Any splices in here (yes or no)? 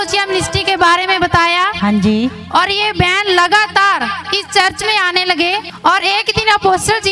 yes